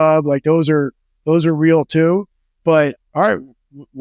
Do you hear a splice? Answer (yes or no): yes